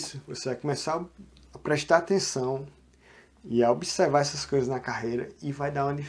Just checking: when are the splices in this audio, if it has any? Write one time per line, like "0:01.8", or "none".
none